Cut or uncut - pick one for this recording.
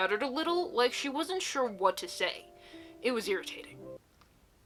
uncut